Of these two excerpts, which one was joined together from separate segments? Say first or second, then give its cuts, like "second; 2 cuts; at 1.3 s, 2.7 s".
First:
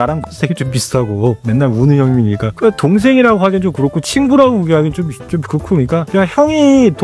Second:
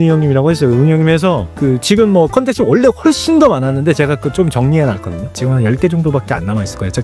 first; 3 cuts; at 1.4 s, 2.5 s, 6.1 s